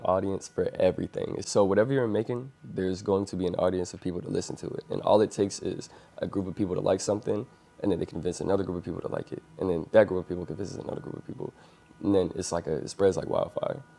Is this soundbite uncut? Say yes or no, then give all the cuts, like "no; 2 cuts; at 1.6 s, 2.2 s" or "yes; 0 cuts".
no; 1 cut; at 1.4 s